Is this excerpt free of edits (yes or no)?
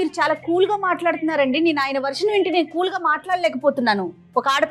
yes